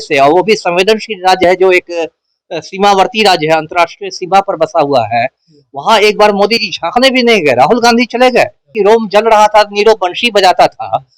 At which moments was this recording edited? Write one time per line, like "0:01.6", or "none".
0:08.7